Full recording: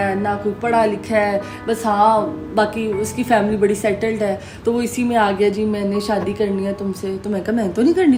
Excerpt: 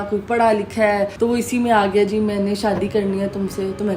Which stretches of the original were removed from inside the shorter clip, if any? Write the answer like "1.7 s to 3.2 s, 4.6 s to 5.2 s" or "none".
1.4 s to 4.6 s